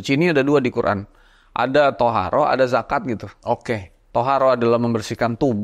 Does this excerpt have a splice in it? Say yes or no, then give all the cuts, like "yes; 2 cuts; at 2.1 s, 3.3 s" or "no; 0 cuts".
yes; 1 cut; at 3.9 s